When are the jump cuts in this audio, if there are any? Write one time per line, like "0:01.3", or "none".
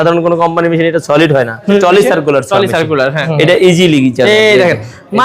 0:01.7
0:03.3